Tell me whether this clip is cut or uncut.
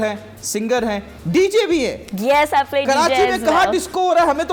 uncut